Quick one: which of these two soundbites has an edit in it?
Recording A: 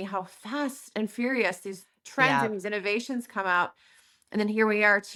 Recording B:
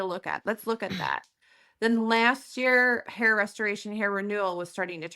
B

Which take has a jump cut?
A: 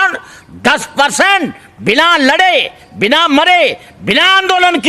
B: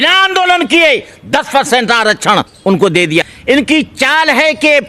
B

